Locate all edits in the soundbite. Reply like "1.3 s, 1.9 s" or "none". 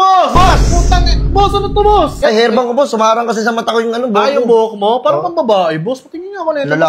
2.1 s